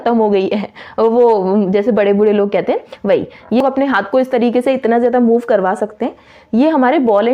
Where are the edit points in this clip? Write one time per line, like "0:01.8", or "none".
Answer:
0:03.6